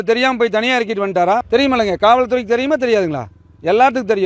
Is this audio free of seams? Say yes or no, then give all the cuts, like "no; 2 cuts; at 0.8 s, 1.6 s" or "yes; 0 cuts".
no; 1 cut; at 1.4 s